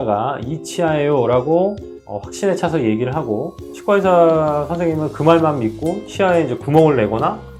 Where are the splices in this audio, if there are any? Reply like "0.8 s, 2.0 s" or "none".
none